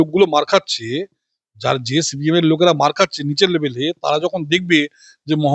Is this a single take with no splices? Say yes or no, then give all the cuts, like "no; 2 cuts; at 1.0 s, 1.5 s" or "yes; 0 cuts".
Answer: yes; 0 cuts